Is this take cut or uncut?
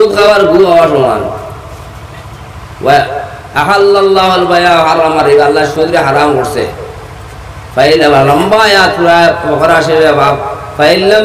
uncut